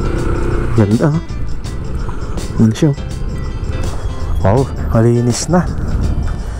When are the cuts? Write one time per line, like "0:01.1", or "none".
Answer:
0:03.8